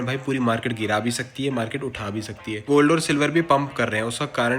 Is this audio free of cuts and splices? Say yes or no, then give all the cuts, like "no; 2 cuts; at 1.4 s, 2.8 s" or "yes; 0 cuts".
no; 1 cut; at 2.6 s